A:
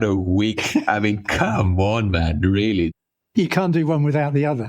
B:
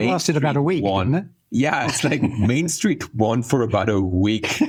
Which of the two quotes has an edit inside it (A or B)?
A